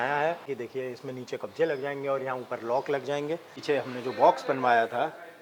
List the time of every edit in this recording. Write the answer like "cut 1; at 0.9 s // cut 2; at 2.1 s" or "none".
cut 1; at 3.5 s